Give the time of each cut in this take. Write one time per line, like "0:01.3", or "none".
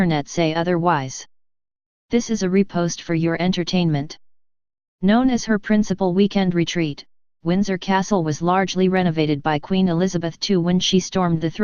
none